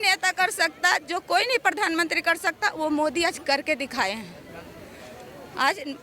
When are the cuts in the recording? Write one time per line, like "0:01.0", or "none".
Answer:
none